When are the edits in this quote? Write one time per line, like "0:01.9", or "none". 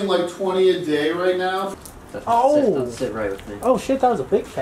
0:01.7